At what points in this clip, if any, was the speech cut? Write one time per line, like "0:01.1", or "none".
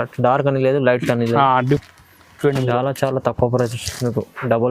0:01.8